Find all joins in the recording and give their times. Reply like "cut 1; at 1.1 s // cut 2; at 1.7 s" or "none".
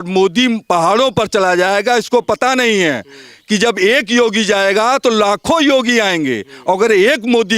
none